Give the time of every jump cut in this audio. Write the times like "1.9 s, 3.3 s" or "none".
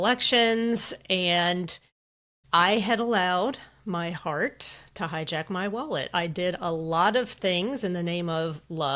none